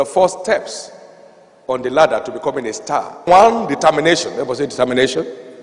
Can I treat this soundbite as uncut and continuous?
no; 1 cut; at 3.3 s

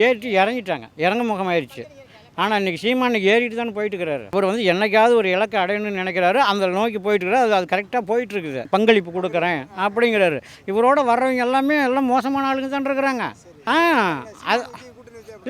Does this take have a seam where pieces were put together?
yes; 3 cuts; at 4.3 s, 8.7 s, 13.5 s

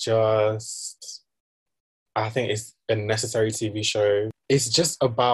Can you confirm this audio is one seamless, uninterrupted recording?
no; 1 cut; at 4.4 s

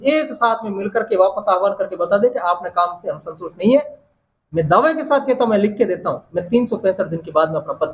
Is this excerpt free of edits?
yes; 0 cuts

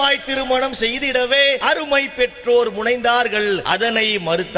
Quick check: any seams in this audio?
yes; 2 cuts; at 1.6 s, 3.6 s

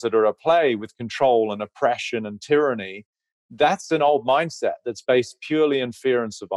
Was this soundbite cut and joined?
no; 0 cuts

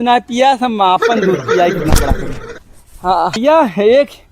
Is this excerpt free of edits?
no; 1 cut; at 3.4 s

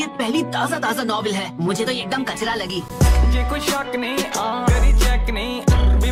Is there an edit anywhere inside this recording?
no; 0 cuts

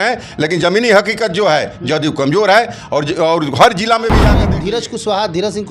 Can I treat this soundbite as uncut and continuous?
no; 1 cut; at 4.4 s

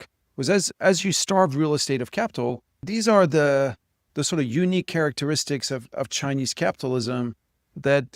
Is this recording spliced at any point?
yes; 1 cut; at 2.9 s

